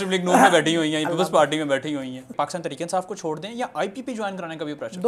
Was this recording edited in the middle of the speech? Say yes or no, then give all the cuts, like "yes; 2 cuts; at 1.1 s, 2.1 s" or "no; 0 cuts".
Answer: yes; 1 cut; at 2.3 s